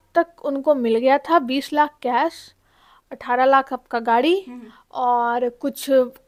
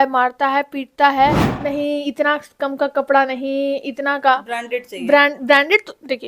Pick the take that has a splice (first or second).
second